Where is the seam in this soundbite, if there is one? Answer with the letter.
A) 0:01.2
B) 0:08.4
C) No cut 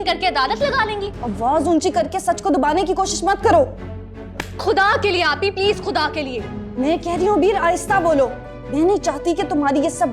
A